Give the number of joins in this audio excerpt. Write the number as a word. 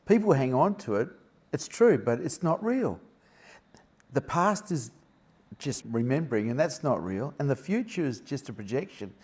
one